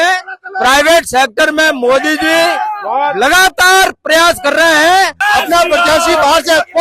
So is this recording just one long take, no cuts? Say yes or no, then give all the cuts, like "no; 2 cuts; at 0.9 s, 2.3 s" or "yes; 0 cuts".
no; 1 cut; at 5.2 s